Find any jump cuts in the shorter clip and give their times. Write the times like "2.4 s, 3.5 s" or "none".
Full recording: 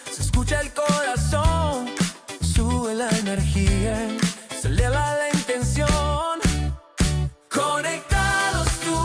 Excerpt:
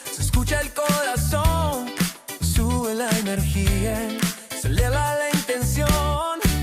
none